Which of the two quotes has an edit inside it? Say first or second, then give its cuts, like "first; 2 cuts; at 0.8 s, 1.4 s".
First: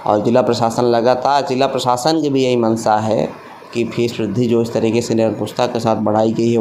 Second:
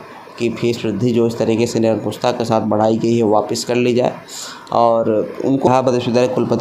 second; 1 cut; at 5.7 s